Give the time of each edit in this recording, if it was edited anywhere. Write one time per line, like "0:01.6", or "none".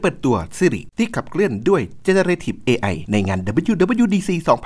0:00.8
0:03.0